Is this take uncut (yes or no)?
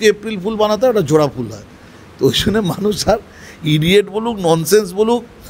yes